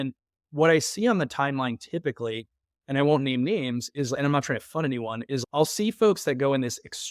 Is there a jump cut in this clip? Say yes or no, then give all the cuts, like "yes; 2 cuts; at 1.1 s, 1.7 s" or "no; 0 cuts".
yes; 1 cut; at 5.4 s